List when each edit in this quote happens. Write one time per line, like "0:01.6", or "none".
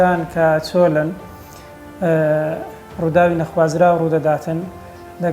none